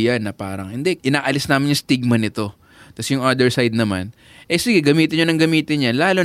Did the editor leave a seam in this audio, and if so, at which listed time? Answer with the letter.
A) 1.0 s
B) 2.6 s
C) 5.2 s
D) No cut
A